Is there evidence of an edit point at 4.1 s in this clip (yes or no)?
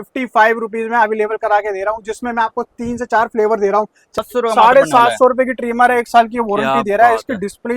yes